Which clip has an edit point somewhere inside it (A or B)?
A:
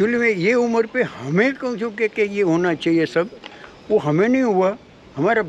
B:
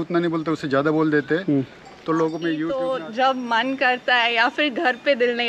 B